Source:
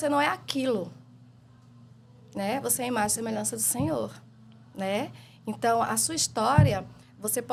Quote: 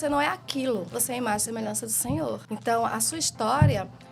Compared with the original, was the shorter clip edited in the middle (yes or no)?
yes